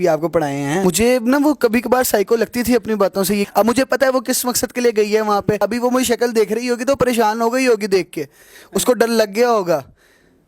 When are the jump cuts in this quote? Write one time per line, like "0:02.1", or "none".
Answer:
0:00.8
0:03.5
0:05.6